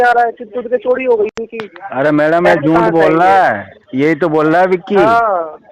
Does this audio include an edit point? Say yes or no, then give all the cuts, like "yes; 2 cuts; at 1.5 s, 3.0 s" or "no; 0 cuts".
no; 0 cuts